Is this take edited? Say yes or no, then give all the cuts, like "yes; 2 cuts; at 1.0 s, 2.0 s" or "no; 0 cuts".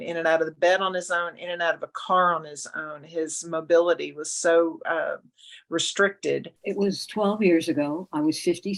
yes; 1 cut; at 6.6 s